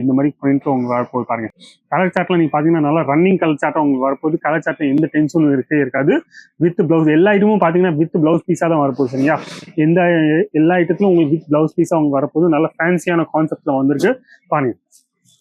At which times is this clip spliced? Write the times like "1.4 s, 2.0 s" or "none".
none